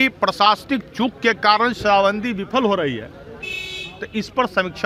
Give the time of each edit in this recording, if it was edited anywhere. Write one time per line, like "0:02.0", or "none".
none